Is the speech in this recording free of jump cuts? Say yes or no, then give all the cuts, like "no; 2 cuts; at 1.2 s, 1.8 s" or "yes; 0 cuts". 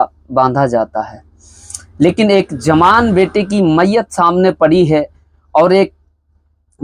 yes; 0 cuts